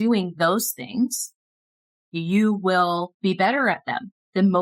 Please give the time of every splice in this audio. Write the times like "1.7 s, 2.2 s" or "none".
3.1 s